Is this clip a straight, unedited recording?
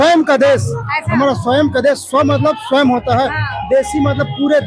yes; 0 cuts

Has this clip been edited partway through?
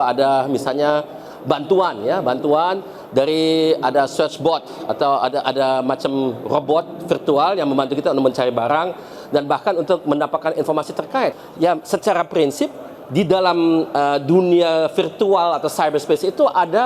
yes; 1 cut; at 11.4 s

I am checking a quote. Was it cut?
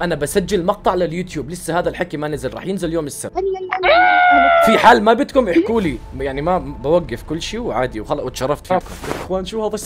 yes; 2 cuts; at 3.2 s, 8.9 s

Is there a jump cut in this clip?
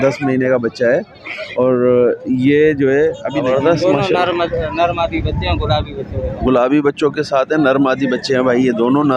yes; 1 cut; at 3.4 s

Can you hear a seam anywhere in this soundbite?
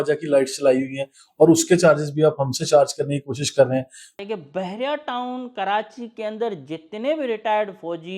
yes; 1 cut; at 4.1 s

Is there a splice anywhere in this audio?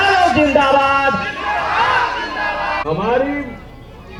no; 0 cuts

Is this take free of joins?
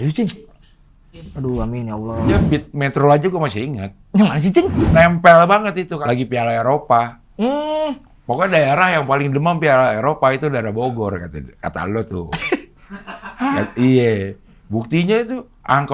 no; 3 cuts; at 2.4 s, 4.8 s, 6.0 s

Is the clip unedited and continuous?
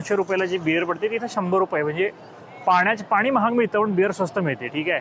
yes; 0 cuts

